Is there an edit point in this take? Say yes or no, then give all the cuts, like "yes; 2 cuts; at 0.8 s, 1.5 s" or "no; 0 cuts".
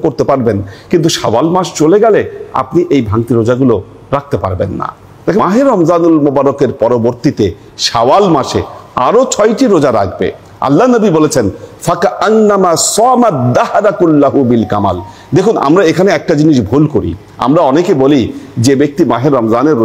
yes; 1 cut; at 5.4 s